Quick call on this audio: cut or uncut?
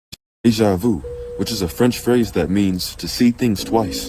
uncut